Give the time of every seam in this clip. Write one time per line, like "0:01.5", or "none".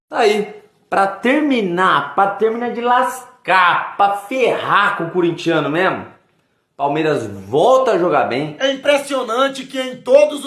0:08.5